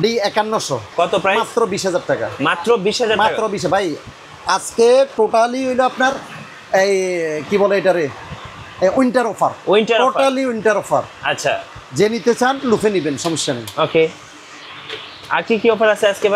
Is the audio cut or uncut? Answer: uncut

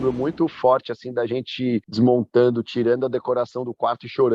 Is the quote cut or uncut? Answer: cut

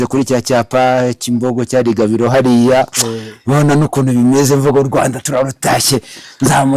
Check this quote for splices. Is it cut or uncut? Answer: uncut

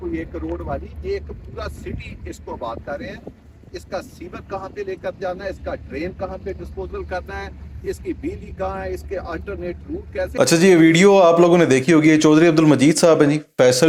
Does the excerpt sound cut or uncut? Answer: uncut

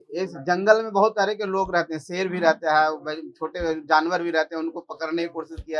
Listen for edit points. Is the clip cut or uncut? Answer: uncut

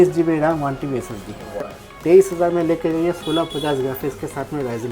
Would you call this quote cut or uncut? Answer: cut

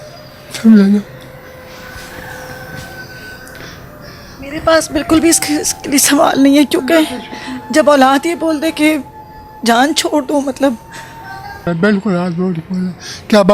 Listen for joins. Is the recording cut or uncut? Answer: cut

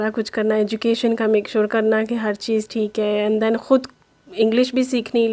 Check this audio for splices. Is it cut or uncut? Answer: uncut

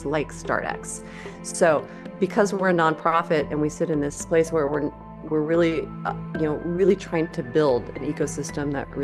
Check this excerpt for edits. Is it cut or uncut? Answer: uncut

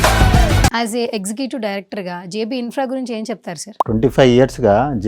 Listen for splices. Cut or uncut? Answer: cut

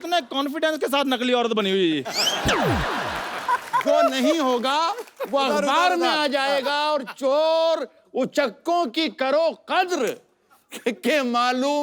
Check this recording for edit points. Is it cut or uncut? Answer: cut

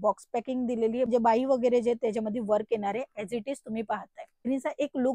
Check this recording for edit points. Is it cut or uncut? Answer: cut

